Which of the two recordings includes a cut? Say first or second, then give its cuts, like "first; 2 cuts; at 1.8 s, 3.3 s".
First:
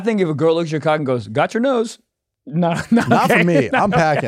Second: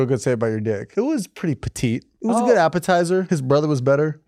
second; 3 cuts; at 0.8 s, 2.1 s, 3.3 s